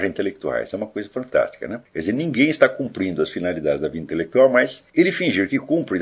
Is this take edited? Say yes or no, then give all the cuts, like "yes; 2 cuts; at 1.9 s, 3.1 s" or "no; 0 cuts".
yes; 2 cuts; at 1.8 s, 4.8 s